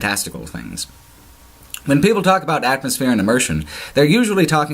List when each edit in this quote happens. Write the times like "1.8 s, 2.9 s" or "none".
1.8 s